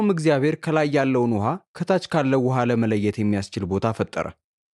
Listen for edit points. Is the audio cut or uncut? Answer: uncut